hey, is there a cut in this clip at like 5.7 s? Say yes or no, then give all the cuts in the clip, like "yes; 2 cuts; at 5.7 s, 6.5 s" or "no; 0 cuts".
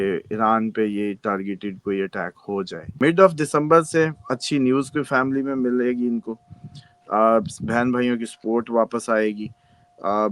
no; 1 cut; at 2.8 s